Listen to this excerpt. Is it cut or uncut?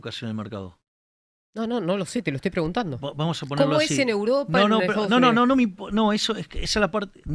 uncut